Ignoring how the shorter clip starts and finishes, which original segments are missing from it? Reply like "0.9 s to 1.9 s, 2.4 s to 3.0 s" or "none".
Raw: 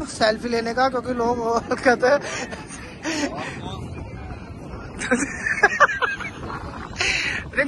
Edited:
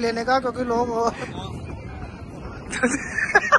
1.7 s to 3.5 s